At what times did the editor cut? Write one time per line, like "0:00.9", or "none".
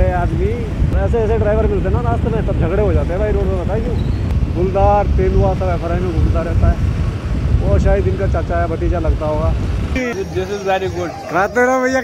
0:00.9
0:04.3
0:10.0